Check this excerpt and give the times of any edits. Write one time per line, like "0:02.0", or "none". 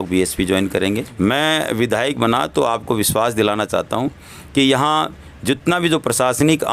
0:01.2